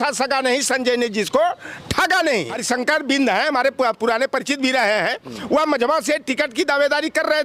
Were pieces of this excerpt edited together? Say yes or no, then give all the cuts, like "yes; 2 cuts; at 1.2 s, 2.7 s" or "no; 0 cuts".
yes; 1 cut; at 2.6 s